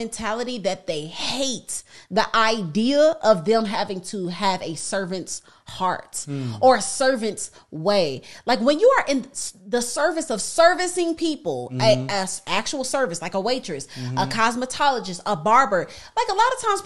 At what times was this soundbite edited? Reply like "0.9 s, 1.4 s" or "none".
none